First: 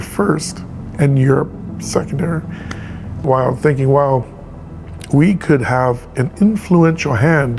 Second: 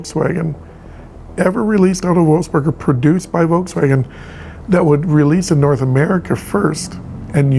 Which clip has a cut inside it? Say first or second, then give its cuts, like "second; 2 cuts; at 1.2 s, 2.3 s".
first; 1 cut; at 3.2 s